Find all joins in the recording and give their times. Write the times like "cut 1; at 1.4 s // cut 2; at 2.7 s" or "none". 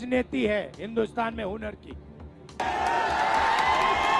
cut 1; at 2.4 s